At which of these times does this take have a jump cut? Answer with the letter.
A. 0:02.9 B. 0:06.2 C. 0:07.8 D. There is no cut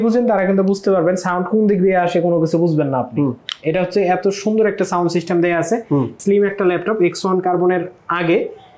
B